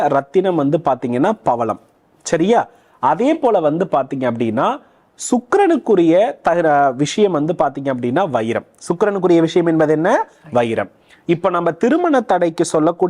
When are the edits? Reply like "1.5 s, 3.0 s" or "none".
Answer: none